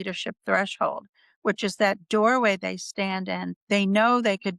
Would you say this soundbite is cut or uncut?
cut